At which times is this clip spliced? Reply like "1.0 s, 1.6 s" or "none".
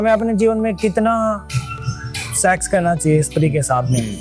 none